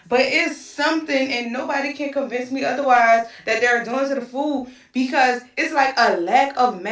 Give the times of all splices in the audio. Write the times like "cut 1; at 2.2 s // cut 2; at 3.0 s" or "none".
cut 1; at 5.4 s